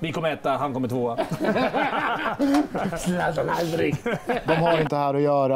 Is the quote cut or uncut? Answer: cut